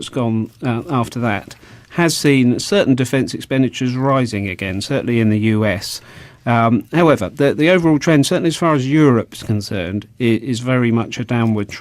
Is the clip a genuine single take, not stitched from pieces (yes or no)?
no